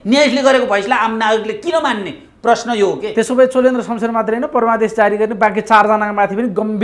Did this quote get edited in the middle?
no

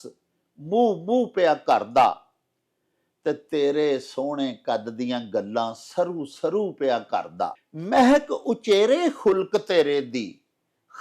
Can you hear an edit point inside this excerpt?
yes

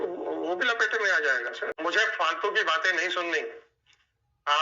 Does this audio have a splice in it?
yes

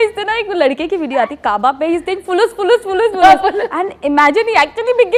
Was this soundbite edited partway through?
no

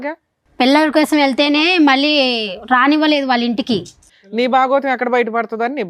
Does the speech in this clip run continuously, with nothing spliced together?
no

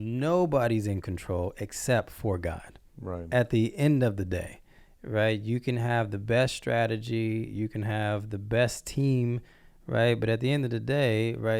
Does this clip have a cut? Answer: no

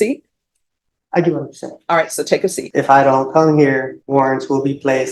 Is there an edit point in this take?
yes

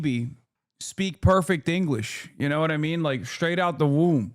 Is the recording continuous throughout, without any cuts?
yes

